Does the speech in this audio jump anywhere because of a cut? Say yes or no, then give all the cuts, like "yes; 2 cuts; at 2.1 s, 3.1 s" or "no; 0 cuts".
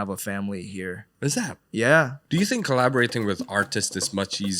yes; 2 cuts; at 1.0 s, 2.2 s